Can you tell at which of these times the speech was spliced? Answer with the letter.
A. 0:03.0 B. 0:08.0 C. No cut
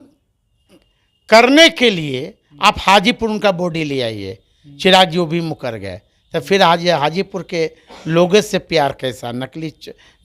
C